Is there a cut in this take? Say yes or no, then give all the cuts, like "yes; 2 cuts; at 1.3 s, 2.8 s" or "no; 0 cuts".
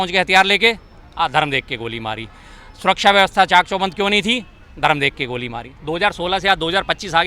yes; 1 cut; at 5.7 s